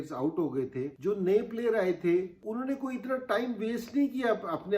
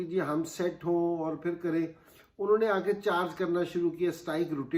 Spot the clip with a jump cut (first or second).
first